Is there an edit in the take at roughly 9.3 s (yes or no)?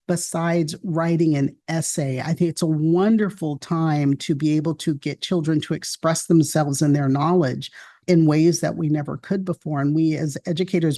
no